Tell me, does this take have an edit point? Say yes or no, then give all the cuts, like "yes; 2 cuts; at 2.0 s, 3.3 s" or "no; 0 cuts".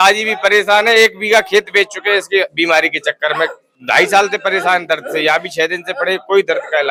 no; 0 cuts